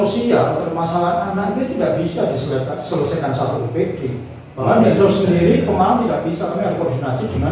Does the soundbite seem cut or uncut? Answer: uncut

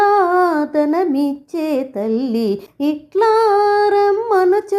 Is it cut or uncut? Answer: cut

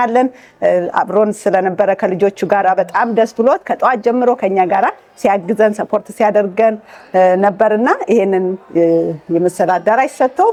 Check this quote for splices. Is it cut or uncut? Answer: uncut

